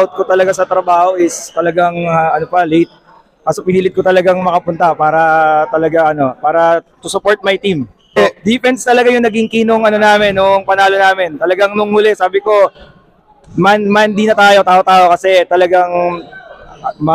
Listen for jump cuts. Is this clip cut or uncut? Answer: cut